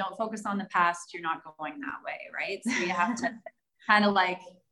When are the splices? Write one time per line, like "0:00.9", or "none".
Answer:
none

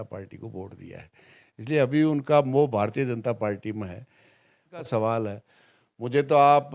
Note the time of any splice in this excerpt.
0:04.9

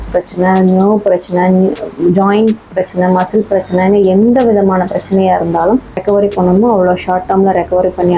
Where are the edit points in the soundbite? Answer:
0:06.0

